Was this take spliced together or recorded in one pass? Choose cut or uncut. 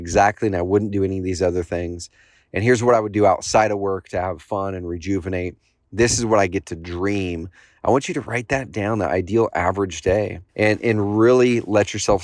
cut